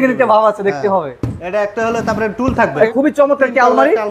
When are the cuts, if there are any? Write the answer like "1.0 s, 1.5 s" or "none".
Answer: 2.9 s